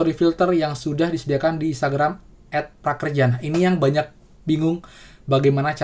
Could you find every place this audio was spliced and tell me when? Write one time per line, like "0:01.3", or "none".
none

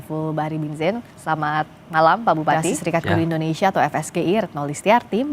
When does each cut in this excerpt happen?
0:02.8

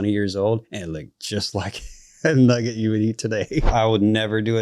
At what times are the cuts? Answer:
0:03.7

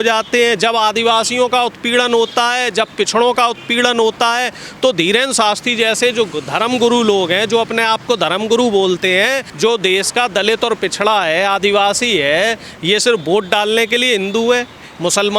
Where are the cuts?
0:09.4

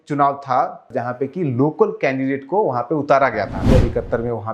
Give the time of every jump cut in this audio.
0:00.9
0:03.7

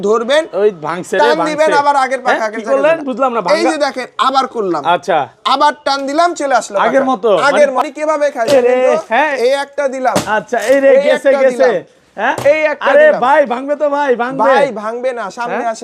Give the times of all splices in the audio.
0:07.9

